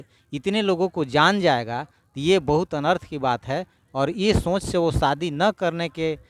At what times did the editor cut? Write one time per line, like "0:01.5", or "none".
none